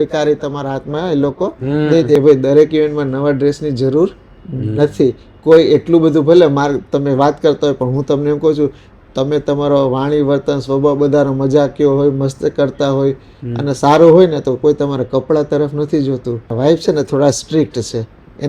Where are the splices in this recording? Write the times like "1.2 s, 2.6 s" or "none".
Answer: 2.2 s, 16.5 s